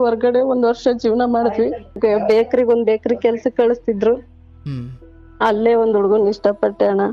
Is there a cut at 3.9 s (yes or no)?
no